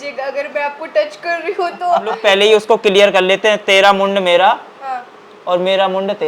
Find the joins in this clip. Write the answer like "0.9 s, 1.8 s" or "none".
2.2 s